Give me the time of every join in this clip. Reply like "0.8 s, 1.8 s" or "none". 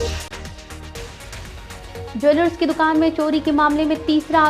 1.0 s

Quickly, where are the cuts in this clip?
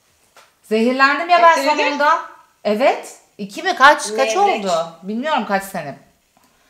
none

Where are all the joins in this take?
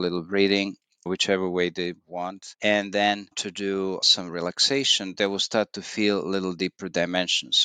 none

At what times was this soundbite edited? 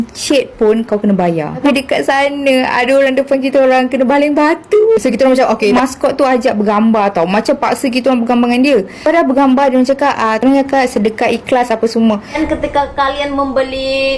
1.5 s, 5.7 s, 12.4 s

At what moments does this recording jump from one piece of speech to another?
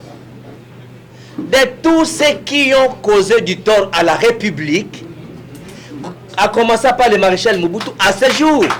none

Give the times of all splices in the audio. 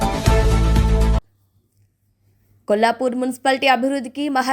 1.3 s

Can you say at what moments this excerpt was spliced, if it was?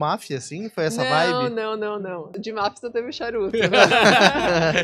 2.3 s

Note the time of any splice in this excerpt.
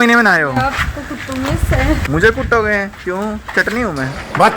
2.0 s

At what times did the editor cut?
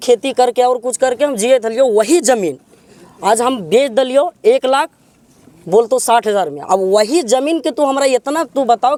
none

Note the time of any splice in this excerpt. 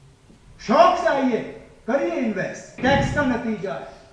2.8 s

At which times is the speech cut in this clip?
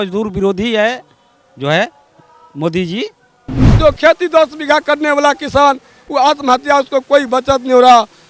3.6 s

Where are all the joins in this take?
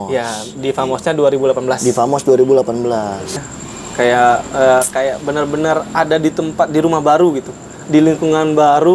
3.3 s

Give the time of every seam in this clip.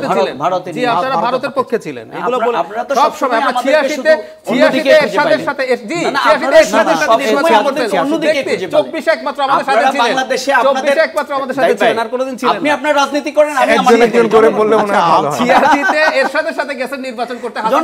none

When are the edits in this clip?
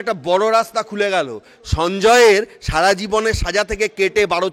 none

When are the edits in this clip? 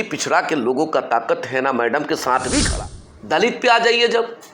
2.7 s

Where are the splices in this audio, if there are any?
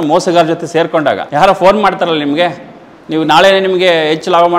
1.2 s

